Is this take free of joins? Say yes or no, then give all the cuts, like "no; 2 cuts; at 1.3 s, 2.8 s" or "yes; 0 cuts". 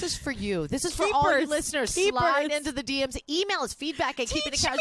yes; 0 cuts